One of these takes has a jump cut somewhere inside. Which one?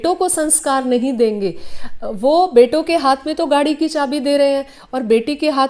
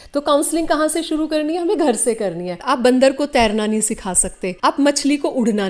second; 2 cuts; at 2.6 s, 4.5 s

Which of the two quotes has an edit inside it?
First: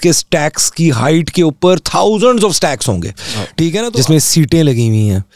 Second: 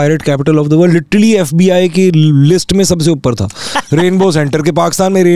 first; 1 cut; at 3.9 s

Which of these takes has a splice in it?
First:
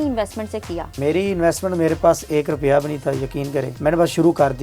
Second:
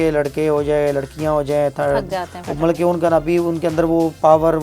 first; 2 cuts; at 1.0 s, 3.7 s

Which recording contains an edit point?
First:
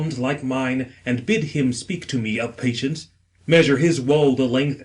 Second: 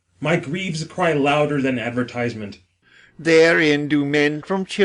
first; 1 cut; at 3.0 s

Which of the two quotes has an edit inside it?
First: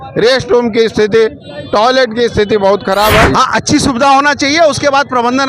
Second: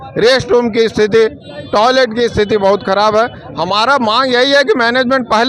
first; 1 cut; at 3.3 s

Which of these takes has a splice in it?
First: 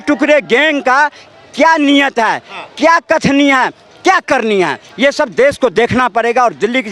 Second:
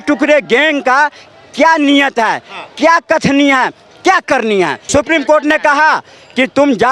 second; 1 cut; at 4.8 s

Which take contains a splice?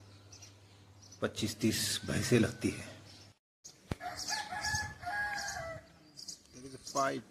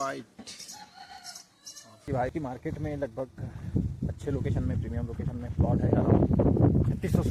second; 1 cut; at 2.0 s

